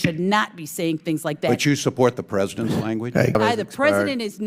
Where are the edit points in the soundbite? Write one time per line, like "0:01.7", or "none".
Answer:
0:03.4